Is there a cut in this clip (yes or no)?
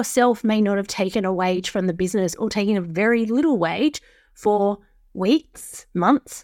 no